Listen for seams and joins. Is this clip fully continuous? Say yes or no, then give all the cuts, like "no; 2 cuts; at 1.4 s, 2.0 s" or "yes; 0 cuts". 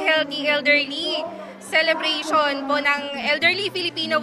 yes; 0 cuts